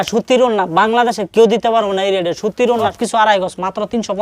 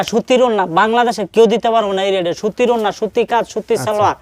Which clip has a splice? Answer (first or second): first